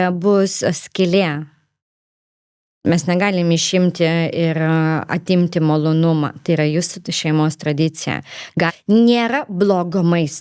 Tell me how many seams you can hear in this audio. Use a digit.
1